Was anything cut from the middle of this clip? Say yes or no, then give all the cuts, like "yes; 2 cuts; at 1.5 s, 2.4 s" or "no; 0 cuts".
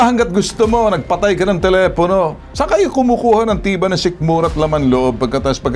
yes; 1 cut; at 2.6 s